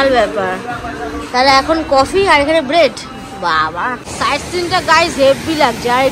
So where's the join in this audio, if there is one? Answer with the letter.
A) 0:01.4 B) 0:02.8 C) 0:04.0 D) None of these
C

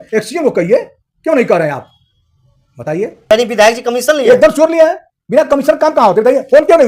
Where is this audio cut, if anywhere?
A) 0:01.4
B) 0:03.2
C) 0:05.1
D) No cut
B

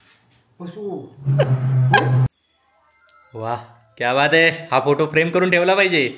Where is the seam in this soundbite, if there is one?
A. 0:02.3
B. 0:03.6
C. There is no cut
A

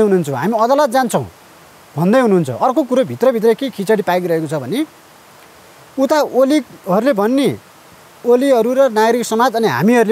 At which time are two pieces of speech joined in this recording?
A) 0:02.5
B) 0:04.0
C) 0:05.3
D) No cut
D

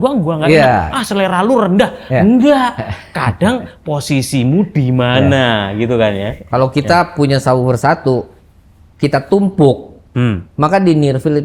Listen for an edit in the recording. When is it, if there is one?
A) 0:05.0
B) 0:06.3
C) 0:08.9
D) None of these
B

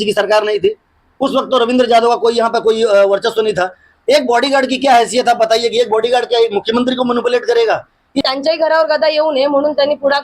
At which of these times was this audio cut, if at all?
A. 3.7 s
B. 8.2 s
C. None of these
B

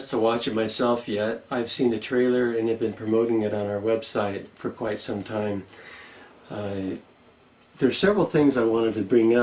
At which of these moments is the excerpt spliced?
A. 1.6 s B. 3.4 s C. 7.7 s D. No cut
B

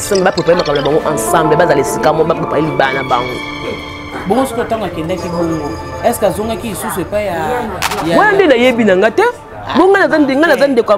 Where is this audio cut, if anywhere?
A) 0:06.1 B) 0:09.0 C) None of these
C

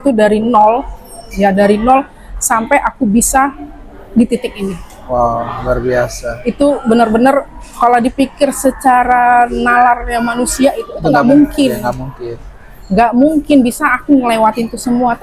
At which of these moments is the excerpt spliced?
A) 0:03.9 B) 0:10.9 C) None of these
C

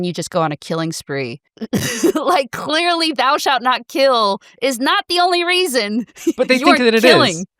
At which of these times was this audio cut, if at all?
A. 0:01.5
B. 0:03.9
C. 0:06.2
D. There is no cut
A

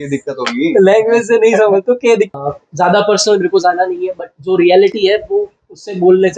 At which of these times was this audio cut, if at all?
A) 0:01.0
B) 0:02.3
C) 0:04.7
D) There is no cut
B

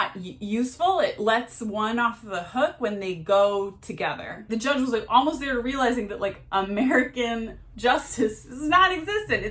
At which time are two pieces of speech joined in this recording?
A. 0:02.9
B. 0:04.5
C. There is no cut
B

